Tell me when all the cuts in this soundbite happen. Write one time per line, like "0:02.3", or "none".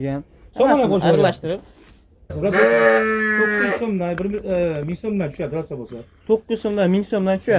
0:02.3